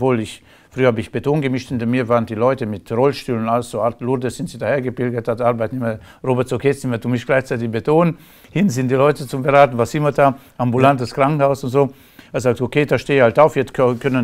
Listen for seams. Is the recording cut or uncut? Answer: cut